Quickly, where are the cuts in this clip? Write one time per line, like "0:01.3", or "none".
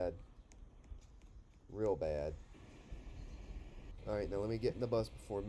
0:03.8